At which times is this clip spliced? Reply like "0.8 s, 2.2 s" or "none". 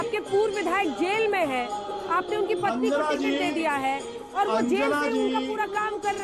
none

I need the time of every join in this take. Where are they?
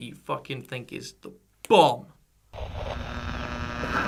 none

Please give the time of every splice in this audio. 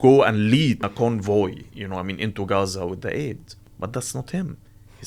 0.8 s, 3.7 s

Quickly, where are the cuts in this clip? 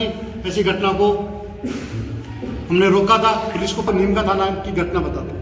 3.8 s

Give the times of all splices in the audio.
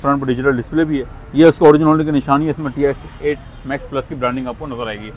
none

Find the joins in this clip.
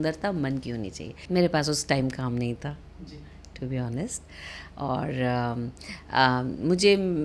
1.1 s

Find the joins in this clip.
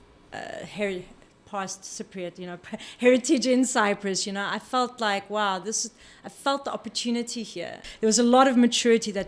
7.8 s

